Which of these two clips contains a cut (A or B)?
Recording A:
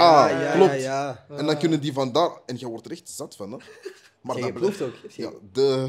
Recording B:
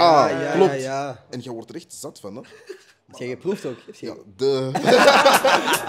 B